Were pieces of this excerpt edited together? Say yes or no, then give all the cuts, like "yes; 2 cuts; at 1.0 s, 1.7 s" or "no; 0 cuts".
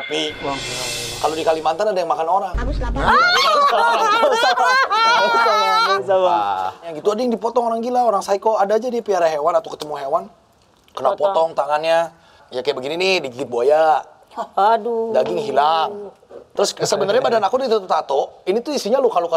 yes; 3 cuts; at 6.9 s, 12.4 s, 16.5 s